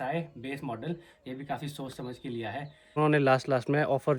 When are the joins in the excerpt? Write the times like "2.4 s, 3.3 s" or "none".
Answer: 2.9 s